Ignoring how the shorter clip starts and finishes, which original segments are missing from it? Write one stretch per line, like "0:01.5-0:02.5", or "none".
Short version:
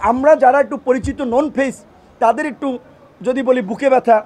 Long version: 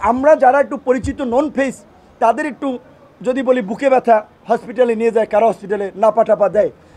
none